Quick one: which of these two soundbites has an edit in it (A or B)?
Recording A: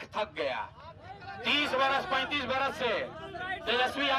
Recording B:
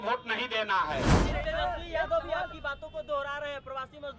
B